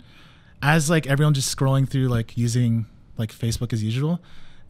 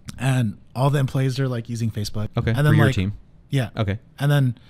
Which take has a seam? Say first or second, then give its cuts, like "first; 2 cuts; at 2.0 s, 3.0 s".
second; 1 cut; at 2.3 s